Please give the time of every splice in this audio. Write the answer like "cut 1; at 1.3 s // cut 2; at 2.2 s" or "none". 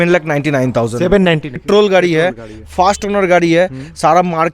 cut 1; at 1.6 s